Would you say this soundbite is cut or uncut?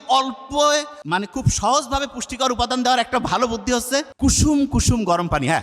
cut